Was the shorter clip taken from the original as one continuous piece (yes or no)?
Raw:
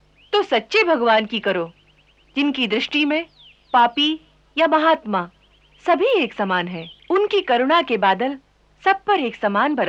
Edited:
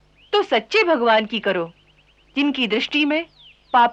yes